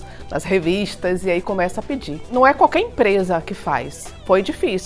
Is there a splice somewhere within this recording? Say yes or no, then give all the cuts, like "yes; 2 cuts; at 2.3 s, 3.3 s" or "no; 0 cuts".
yes; 1 cut; at 2.3 s